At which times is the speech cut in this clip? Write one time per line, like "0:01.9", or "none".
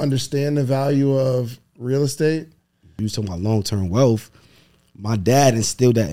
0:02.9